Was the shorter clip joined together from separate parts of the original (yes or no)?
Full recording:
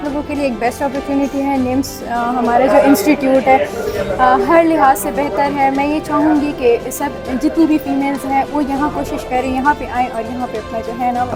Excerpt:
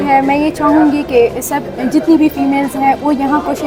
no